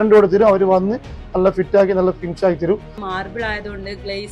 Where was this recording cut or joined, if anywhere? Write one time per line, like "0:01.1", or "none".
0:02.9